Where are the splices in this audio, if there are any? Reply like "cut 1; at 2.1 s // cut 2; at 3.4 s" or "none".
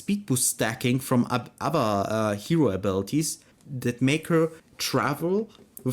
cut 1; at 3.4 s // cut 2; at 4.7 s